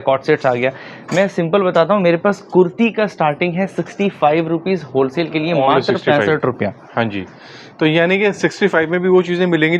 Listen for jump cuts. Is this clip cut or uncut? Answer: uncut